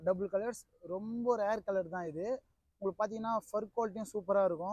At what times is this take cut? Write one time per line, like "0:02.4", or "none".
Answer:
none